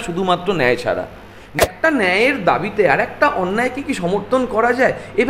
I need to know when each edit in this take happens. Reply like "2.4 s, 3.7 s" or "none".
1.6 s